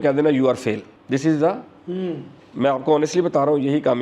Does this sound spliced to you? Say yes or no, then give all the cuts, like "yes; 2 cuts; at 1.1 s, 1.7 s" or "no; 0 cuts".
yes; 1 cut; at 0.9 s